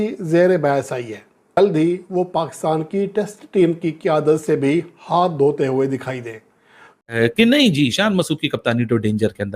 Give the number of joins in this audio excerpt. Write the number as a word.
two